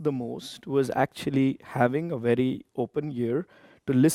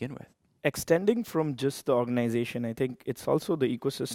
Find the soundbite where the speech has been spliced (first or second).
first